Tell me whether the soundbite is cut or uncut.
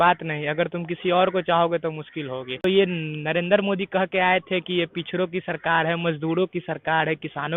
cut